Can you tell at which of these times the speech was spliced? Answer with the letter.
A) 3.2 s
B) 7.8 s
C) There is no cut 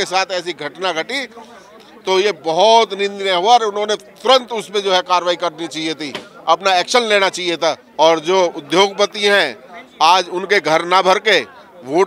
B